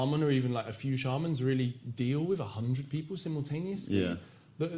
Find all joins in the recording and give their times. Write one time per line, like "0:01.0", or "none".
none